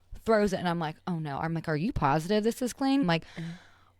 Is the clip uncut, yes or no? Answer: no